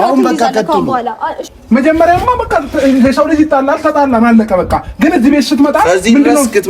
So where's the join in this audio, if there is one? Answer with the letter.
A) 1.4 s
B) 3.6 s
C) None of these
A